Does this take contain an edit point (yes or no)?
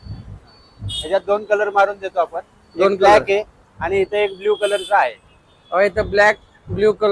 no